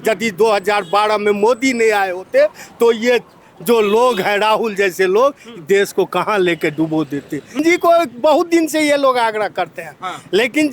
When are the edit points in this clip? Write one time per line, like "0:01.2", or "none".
0:07.6